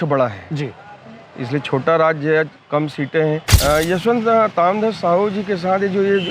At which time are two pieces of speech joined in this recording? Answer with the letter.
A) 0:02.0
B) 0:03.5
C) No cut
B